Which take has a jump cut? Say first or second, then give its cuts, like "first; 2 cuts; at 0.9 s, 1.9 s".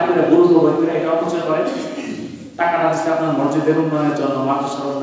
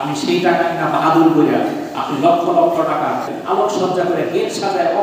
second; 1 cut; at 3.3 s